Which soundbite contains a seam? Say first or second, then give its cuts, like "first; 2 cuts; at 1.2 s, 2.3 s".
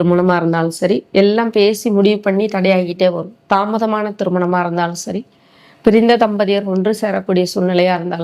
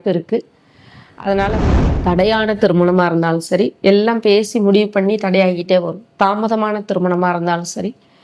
second; 1 cut; at 1.8 s